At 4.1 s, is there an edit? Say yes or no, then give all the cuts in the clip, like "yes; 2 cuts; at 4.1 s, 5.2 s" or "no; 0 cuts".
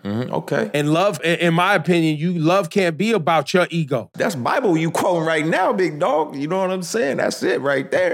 yes; 2 cuts; at 1.2 s, 4.1 s